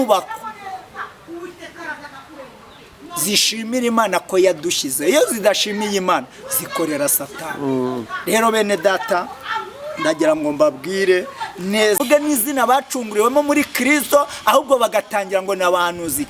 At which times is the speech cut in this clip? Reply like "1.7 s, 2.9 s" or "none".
12.0 s